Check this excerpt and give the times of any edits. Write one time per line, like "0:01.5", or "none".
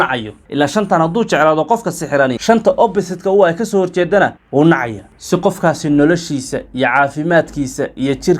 0:02.4